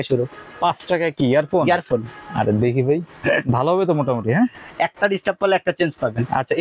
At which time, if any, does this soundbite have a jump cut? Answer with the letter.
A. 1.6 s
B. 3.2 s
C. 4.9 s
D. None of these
D